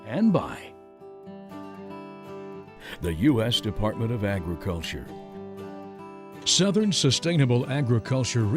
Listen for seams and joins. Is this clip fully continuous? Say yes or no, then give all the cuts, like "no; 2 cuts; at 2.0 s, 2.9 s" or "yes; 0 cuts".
yes; 0 cuts